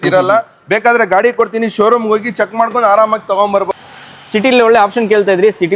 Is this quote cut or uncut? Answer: cut